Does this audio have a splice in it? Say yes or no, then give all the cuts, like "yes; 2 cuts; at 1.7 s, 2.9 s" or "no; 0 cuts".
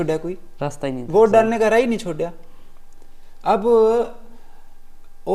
no; 0 cuts